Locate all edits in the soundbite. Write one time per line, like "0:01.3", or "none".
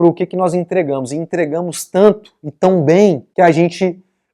0:03.2